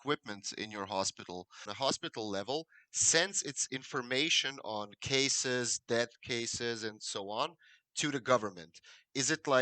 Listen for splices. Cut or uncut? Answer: cut